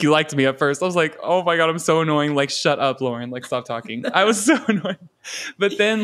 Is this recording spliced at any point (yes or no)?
no